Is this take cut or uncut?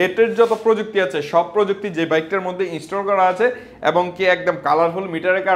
uncut